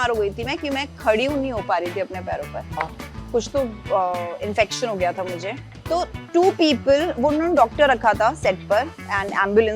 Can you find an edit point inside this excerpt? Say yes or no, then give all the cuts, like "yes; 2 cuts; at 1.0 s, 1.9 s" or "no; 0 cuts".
yes; 2 cuts; at 2.8 s, 5.7 s